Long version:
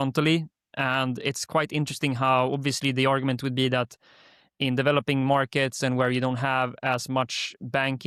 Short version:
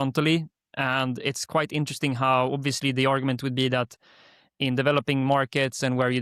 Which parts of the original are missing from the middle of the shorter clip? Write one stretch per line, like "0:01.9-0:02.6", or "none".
none